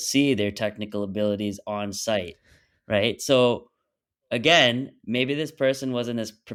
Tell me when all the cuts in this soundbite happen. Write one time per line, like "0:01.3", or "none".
none